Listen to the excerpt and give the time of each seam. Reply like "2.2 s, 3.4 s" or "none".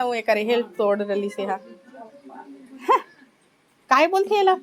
none